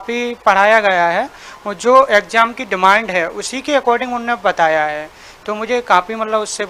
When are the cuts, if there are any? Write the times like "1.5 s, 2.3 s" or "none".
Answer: none